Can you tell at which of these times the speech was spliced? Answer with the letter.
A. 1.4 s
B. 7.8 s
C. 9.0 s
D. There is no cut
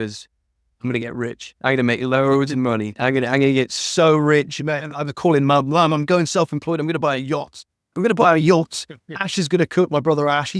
D